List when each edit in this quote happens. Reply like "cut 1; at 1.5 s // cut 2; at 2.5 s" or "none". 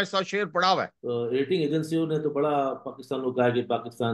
cut 1; at 1.0 s